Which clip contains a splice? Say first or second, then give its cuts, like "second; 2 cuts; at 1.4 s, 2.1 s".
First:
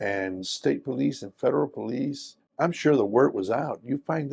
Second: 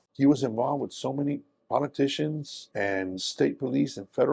first; 1 cut; at 2.5 s